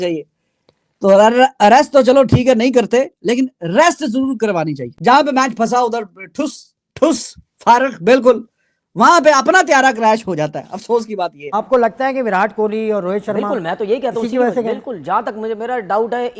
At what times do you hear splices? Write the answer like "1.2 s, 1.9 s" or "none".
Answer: 4.9 s, 11.5 s